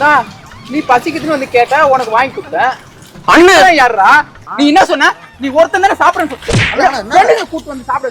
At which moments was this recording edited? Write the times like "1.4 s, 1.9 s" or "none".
4.4 s